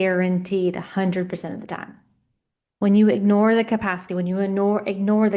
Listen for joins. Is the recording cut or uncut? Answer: uncut